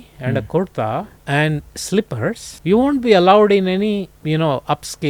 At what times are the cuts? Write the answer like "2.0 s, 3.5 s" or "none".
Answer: 1.1 s, 2.5 s, 4.1 s